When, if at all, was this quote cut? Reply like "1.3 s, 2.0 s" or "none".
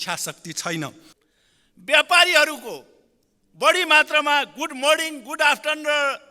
1.1 s